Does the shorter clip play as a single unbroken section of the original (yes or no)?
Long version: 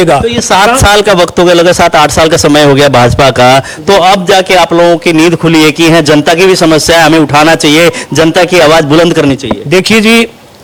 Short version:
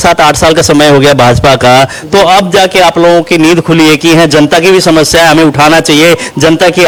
yes